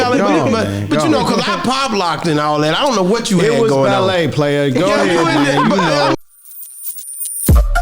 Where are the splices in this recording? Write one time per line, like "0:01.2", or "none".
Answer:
0:06.1

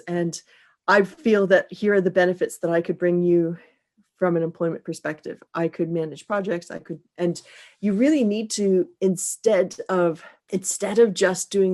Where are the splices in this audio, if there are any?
0:10.3

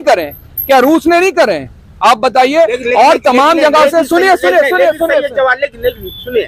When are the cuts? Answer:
none

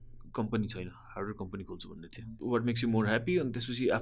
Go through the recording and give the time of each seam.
0:02.4

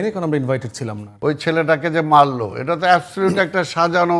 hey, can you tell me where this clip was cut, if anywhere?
0:01.0

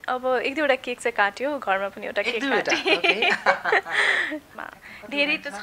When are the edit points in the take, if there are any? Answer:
0:04.5

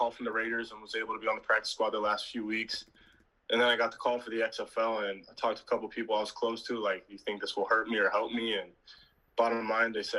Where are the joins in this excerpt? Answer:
none

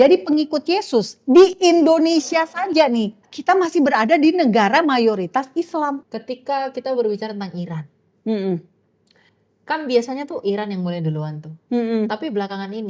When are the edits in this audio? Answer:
0:03.3
0:06.1

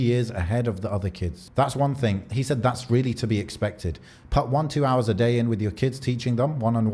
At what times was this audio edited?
0:01.4
0:02.2

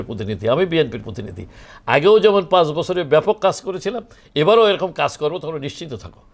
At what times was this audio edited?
0:01.6

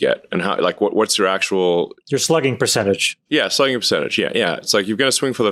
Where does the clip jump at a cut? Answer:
none

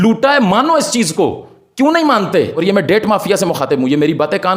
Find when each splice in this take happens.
0:02.5

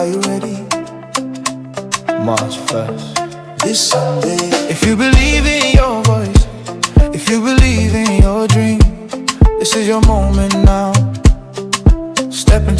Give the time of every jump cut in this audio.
0:10.9

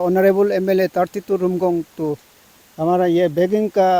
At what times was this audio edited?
none

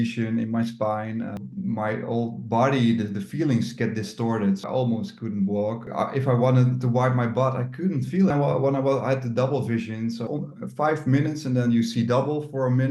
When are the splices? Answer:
0:01.4
0:04.6
0:05.8
0:08.3
0:10.2

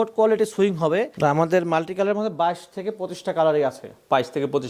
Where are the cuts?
0:01.1

